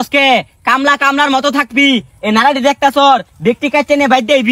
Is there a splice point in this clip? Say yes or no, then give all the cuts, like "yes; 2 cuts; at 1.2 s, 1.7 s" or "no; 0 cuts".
no; 0 cuts